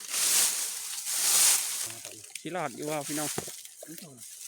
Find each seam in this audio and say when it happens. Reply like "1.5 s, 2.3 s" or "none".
1.9 s